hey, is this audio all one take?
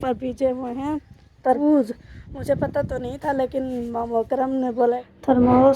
no; 2 cuts; at 1.4 s, 4.8 s

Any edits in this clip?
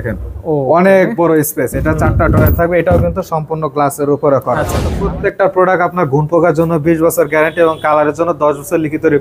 yes; 1 cut; at 4.9 s

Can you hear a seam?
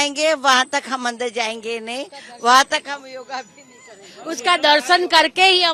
no; 0 cuts

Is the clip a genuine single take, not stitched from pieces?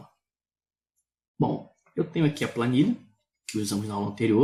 yes; 0 cuts

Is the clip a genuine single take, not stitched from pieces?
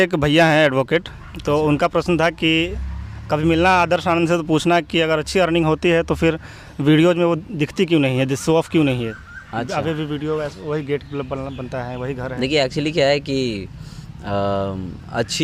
yes; 0 cuts

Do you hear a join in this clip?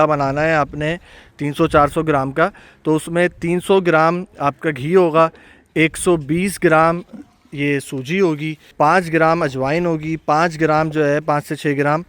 no; 0 cuts

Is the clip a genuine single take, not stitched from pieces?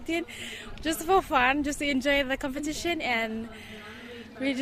yes; 0 cuts

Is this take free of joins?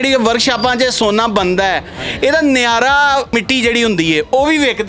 no; 1 cut; at 3.3 s

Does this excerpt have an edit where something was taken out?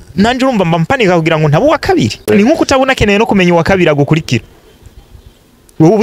yes; 1 cut; at 2.2 s

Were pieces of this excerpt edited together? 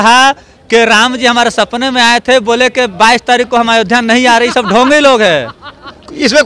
no; 0 cuts

